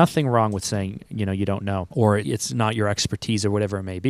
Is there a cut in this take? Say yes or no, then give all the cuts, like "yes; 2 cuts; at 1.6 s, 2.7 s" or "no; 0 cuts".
yes; 1 cut; at 2.1 s